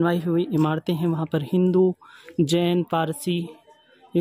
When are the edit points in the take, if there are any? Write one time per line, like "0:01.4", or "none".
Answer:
none